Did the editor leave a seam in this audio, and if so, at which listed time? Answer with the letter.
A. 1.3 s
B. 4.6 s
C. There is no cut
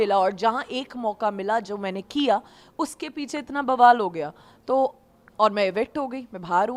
C